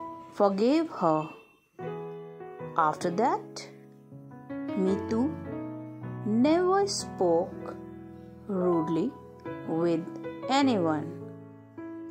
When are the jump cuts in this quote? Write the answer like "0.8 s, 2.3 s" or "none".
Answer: none